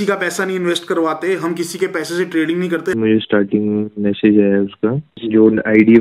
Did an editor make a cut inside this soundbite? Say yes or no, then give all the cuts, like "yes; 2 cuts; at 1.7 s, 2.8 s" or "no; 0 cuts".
yes; 2 cuts; at 2.9 s, 5.1 s